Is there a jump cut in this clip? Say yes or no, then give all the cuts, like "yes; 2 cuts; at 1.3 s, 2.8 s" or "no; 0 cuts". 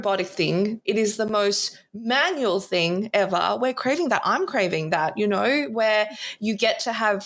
no; 0 cuts